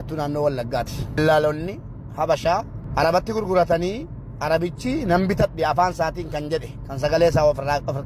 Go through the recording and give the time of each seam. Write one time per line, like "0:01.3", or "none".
0:01.2
0:02.8